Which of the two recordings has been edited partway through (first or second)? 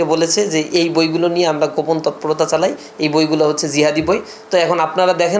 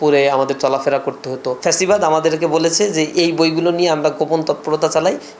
second